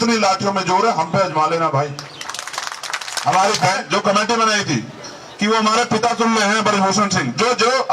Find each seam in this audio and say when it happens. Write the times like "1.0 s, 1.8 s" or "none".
3.6 s